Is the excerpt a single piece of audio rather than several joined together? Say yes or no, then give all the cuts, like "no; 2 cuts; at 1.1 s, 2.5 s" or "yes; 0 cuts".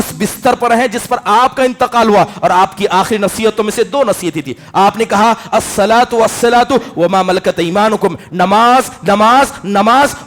yes; 0 cuts